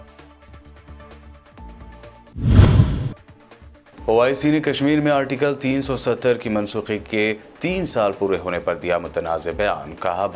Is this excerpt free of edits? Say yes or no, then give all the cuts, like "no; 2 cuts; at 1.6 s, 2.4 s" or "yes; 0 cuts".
no; 1 cut; at 1.9 s